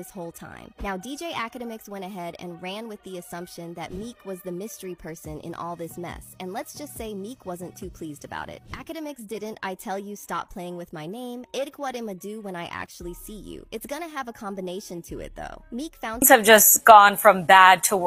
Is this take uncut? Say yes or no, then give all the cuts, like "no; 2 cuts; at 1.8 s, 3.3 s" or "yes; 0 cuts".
no; 1 cut; at 16.2 s